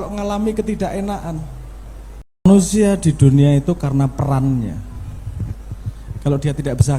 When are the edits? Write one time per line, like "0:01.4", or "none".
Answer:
0:02.5